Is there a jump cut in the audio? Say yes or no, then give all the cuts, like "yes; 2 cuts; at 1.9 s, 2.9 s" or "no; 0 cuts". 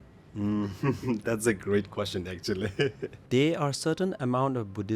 yes; 1 cut; at 3.2 s